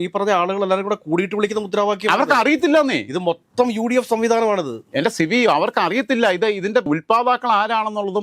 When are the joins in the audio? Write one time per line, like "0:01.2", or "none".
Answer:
none